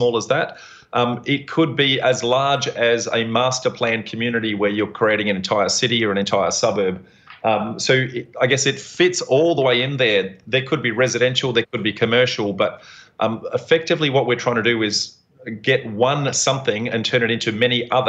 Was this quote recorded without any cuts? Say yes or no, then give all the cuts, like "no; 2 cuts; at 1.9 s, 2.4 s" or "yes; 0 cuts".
yes; 0 cuts